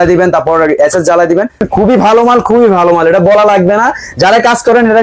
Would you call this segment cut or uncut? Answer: cut